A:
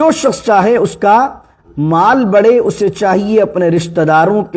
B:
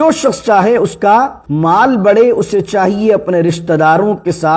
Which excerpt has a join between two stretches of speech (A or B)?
B